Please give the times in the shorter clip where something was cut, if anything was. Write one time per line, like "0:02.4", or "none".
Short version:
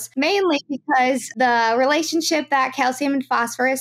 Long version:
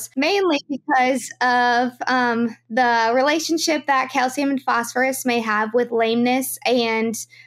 0:01.3

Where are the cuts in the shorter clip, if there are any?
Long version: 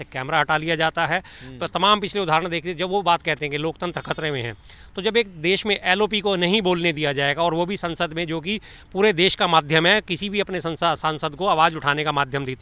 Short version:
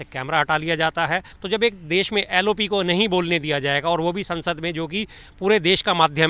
0:01.3

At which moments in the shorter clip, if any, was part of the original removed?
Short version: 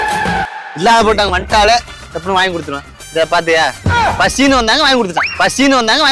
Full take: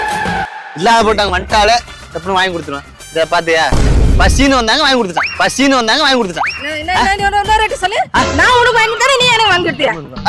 none

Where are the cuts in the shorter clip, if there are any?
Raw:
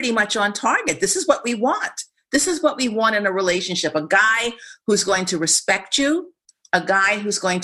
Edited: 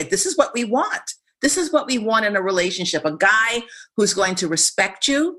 none

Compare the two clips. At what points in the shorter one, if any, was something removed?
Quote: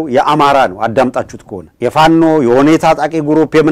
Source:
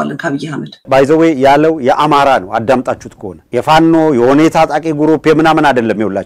none

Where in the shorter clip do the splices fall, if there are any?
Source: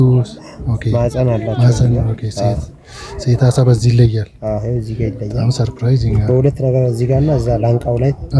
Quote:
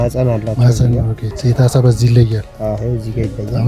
0:01.2

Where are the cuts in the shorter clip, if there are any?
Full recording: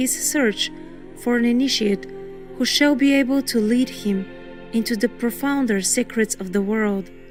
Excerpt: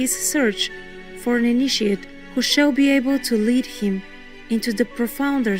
0:02.1

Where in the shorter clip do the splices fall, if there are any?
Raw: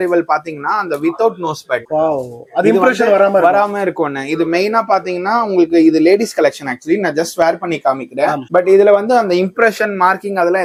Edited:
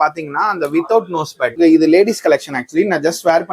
0:01.6

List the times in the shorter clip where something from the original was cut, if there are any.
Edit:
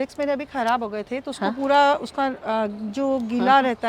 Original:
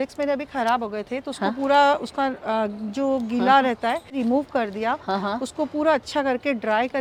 none

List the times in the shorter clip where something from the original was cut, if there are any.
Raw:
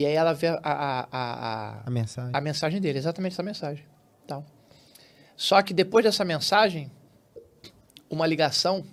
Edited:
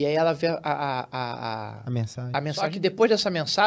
0:02.7

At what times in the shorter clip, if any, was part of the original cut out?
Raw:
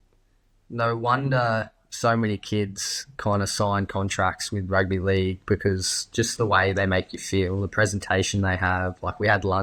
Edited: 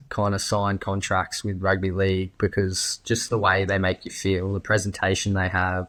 none

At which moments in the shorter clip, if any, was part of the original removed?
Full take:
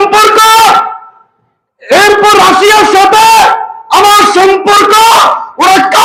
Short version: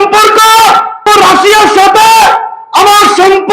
0:01.0

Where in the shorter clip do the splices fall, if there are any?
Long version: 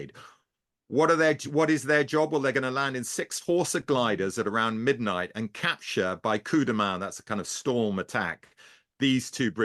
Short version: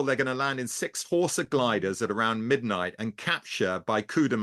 none

